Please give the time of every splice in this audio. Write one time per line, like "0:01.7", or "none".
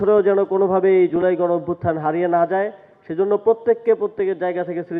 none